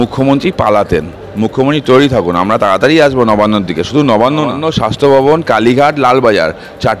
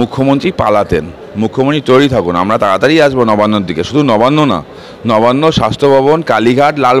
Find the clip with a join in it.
first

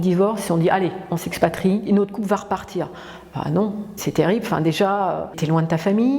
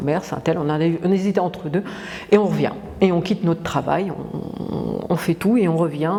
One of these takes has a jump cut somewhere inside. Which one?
first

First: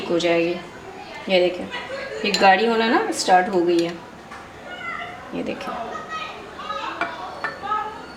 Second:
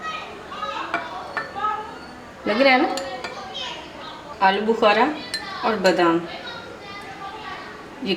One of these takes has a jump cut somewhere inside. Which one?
second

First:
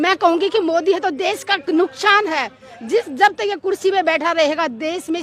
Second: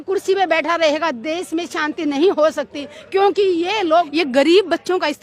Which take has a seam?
second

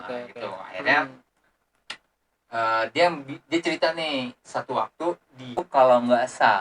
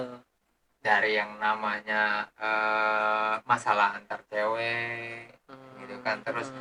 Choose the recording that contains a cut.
first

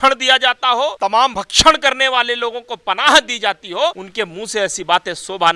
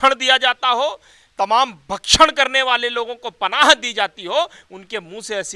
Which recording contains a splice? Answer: first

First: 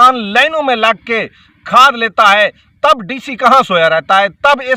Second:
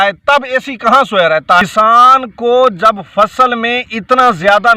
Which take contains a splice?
second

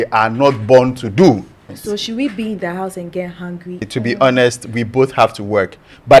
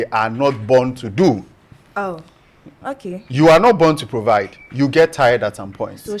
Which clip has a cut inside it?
first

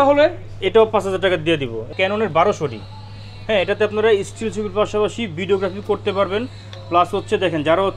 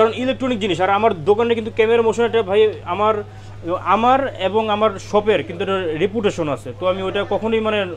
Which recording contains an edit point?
first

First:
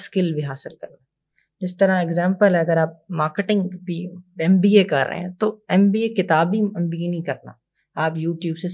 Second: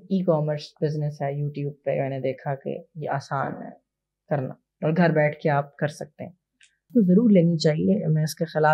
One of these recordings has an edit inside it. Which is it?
second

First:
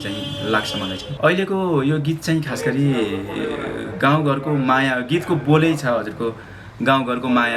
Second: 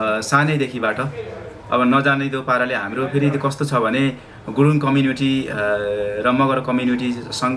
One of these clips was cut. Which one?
first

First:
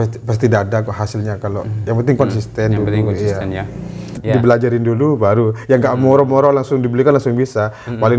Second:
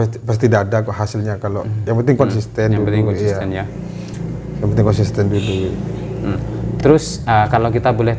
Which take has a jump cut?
first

